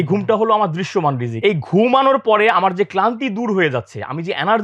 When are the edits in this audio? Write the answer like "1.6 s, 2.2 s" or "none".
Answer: 1.3 s